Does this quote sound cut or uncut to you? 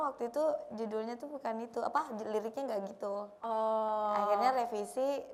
uncut